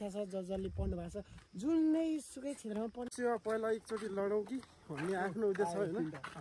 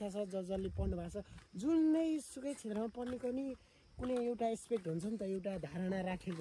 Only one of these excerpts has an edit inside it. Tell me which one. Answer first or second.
first